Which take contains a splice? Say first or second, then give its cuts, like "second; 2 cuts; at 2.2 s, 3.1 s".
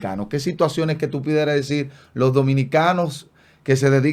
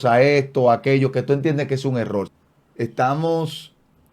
second; 1 cut; at 2.4 s